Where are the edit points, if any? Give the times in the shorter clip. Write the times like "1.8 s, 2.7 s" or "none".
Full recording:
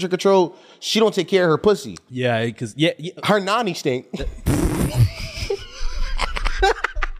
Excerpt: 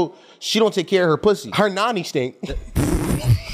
1.5 s